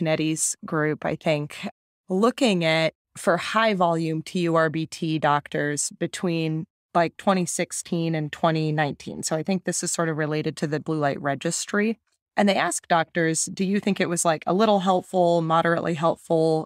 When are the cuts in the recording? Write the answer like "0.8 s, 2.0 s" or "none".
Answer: 3.1 s